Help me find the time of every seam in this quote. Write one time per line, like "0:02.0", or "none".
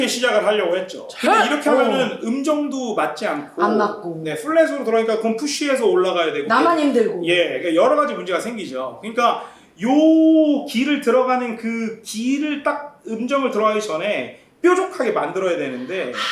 none

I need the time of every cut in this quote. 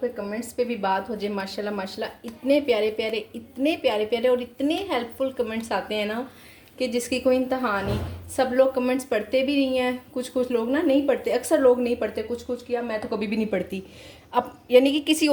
none

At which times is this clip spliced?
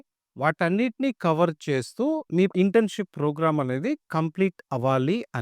0:02.5

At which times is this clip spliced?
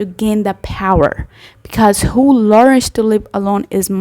none

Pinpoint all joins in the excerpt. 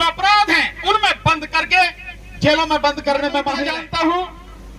0:03.6

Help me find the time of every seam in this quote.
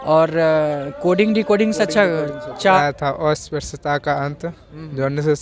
0:02.8

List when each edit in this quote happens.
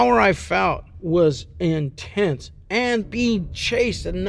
0:00.9
0:03.0

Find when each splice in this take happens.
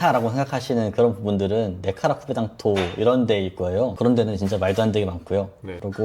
none

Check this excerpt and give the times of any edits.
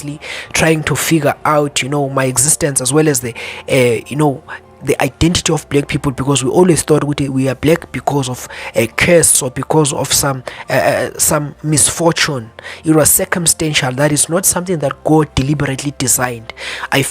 0:09.4

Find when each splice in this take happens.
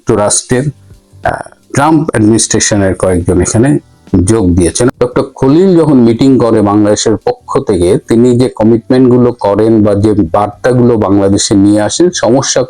0:04.9

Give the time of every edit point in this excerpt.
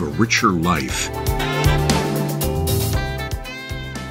none

